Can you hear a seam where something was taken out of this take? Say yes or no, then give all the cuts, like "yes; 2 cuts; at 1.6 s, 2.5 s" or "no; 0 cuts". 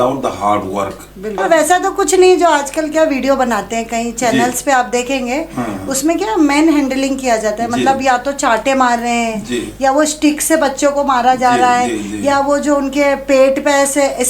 yes; 1 cut; at 1.4 s